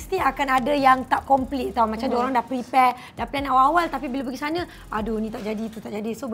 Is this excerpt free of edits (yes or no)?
yes